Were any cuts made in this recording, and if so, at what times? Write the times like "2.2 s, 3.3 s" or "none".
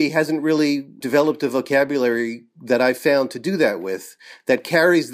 1.0 s